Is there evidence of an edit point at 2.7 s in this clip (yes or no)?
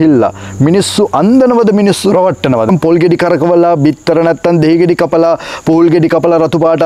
yes